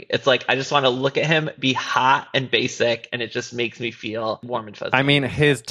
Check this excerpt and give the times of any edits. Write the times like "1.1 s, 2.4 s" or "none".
4.4 s